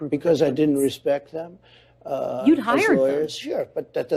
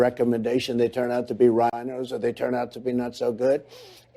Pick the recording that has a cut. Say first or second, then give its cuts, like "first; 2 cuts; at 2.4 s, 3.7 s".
second; 1 cut; at 1.8 s